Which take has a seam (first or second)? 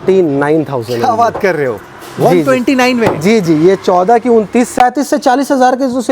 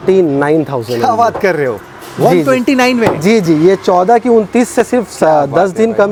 first